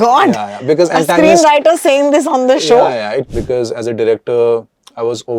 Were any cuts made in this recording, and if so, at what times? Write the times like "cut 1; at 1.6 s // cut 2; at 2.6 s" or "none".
cut 1; at 3.2 s